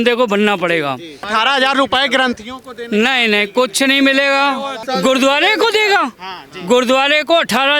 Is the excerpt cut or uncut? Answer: cut